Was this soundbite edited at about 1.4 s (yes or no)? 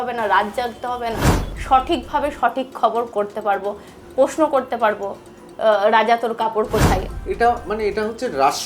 yes